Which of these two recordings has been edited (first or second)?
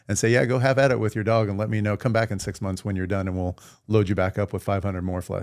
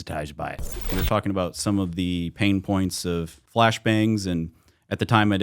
second